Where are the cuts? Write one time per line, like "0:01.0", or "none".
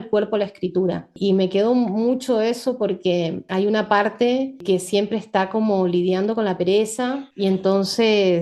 none